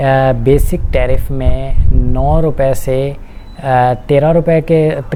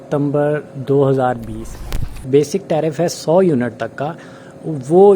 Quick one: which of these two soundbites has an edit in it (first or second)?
second